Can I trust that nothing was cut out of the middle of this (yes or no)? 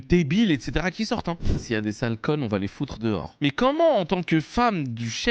no